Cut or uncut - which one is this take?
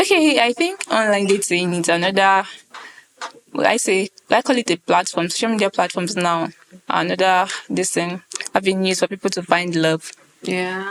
uncut